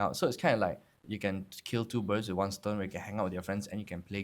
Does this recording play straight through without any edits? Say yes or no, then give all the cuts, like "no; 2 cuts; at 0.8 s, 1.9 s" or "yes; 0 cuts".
no; 1 cut; at 1.0 s